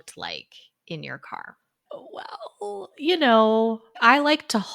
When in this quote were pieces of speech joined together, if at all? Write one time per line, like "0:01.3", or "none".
0:01.8